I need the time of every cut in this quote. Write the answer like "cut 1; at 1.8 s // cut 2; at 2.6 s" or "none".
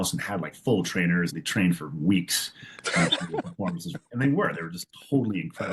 cut 1; at 1.4 s

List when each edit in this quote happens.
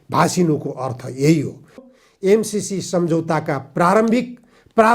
cut 1; at 1.8 s

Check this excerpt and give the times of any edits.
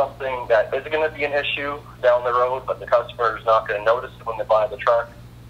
none

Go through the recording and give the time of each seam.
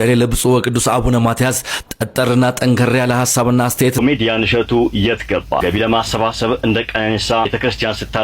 cut 1; at 3.9 s

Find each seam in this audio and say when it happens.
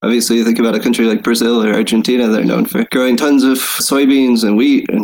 cut 1; at 3.8 s

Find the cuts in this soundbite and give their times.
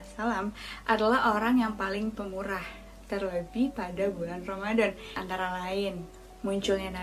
cut 1; at 5.1 s

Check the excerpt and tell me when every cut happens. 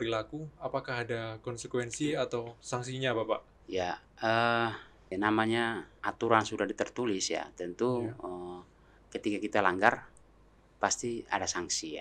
cut 1; at 4.9 s // cut 2; at 5.9 s

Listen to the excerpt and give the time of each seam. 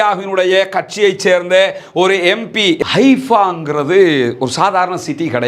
cut 1; at 2.8 s

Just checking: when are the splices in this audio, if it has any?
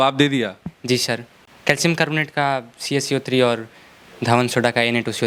none

